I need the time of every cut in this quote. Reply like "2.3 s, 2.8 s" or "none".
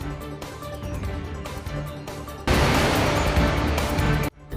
none